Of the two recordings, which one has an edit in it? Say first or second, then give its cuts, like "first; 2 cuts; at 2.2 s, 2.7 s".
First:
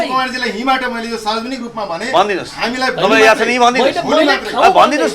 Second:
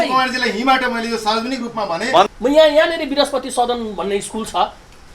second; 1 cut; at 2.3 s